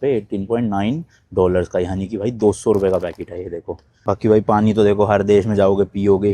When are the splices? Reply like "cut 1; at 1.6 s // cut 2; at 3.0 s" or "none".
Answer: cut 1; at 4.0 s